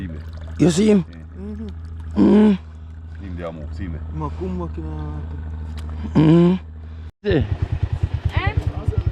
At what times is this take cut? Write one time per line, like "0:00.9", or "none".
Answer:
0:07.1